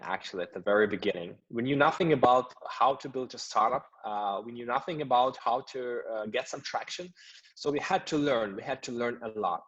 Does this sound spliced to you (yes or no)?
no